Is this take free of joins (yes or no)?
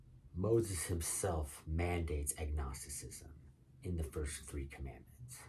yes